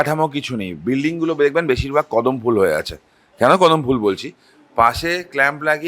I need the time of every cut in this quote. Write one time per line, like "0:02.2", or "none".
none